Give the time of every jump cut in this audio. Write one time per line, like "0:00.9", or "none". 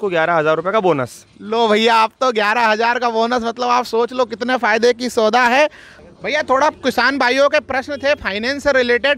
0:05.9